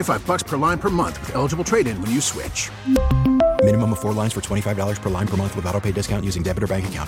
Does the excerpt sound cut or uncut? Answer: uncut